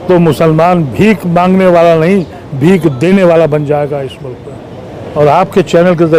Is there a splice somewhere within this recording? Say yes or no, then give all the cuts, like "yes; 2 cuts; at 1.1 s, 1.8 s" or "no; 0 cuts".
yes; 1 cut; at 5.1 s